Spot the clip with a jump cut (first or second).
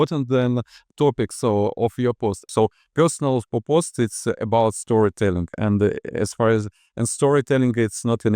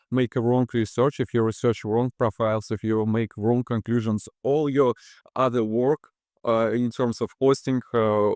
first